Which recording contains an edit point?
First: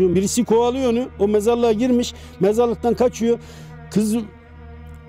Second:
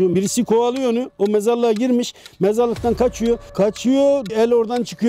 second; 2 cuts; at 3.5 s, 4.3 s

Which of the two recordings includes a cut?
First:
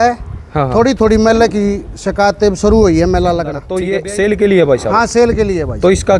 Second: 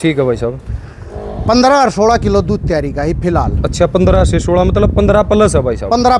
first; 1 cut; at 3.7 s

